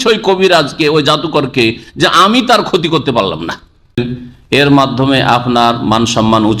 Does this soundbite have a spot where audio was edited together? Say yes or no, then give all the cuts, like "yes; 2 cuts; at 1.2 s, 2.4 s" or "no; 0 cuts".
yes; 1 cut; at 4.0 s